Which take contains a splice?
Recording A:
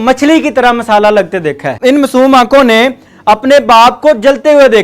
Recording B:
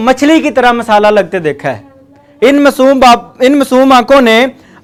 A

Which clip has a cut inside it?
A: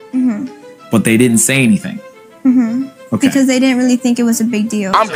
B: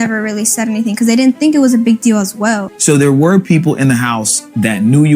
B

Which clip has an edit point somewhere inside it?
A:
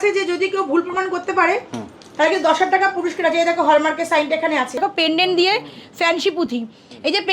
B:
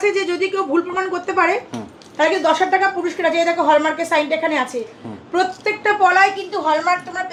A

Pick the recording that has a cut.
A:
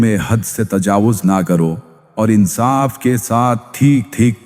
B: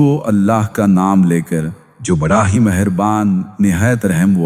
A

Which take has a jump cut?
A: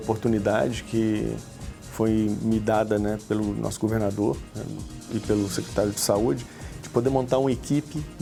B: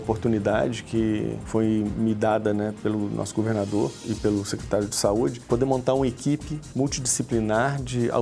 B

